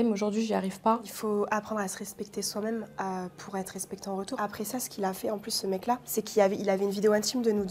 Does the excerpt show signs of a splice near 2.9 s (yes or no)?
no